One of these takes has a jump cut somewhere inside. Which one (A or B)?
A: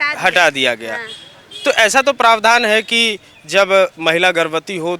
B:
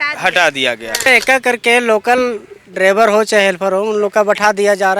B